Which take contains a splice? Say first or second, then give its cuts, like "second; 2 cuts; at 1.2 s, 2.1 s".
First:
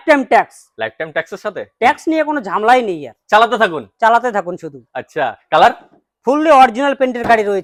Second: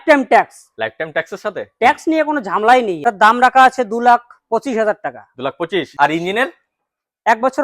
second; 2 cuts; at 3.0 s, 5.9 s